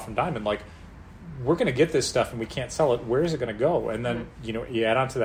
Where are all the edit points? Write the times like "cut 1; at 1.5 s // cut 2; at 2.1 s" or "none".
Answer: none